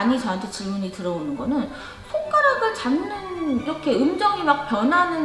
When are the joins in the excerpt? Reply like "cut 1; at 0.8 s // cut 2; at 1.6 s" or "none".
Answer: cut 1; at 3.7 s